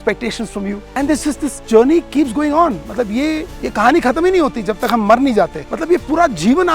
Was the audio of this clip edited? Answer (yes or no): yes